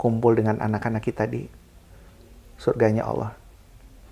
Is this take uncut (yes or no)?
yes